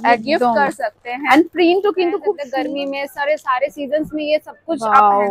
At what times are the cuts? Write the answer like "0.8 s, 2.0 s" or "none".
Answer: 2.5 s